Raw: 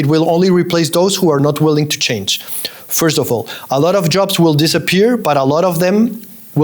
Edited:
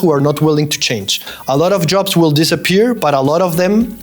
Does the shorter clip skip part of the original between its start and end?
yes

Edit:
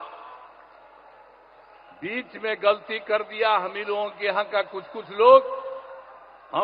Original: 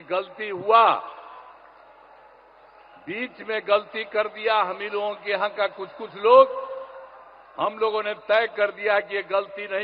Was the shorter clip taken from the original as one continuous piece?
yes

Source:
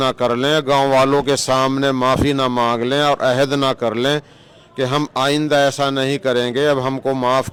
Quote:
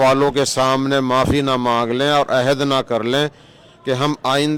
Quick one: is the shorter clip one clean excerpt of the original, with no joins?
yes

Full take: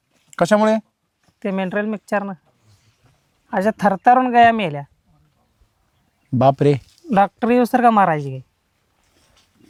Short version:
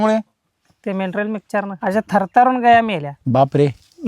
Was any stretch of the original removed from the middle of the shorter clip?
yes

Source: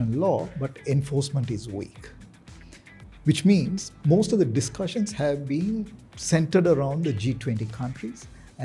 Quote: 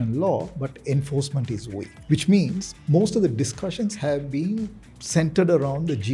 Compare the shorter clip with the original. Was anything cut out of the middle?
yes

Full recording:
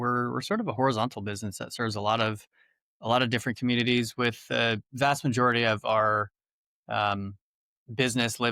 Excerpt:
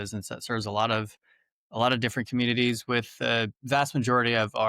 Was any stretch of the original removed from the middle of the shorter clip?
no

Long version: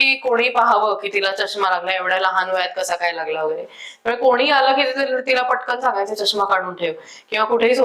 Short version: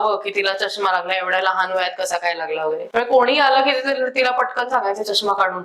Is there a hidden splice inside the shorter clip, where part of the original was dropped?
yes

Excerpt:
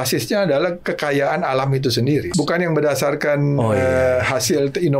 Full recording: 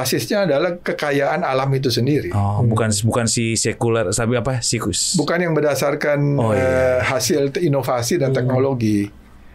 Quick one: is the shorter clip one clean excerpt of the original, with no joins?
no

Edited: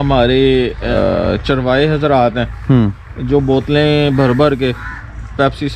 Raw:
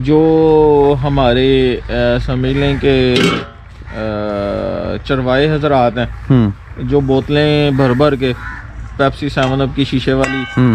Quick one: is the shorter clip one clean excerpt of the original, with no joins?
no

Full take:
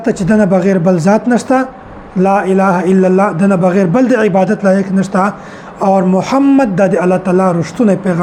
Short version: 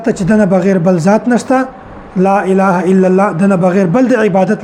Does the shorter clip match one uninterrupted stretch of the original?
yes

